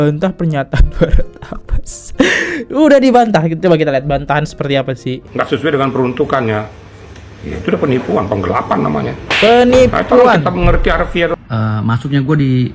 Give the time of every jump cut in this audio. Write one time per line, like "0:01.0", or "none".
0:05.1
0:11.3